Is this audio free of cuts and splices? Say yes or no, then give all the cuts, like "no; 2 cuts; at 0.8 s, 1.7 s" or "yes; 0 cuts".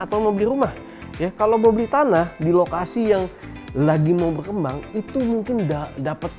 yes; 0 cuts